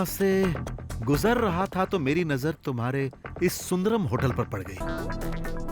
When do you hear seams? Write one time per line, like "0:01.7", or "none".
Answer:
0:04.8